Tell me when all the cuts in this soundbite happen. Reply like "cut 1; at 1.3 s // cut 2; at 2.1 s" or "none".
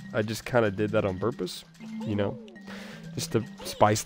none